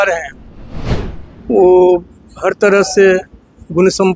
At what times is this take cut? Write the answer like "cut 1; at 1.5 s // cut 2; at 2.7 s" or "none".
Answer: none